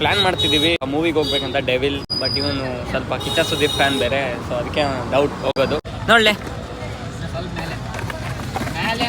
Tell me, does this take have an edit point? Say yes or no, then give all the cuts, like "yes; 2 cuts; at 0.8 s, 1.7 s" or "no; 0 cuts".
yes; 3 cuts; at 0.9 s, 2.1 s, 5.9 s